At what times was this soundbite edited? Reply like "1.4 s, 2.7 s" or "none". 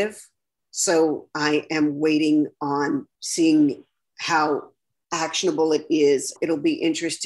6.3 s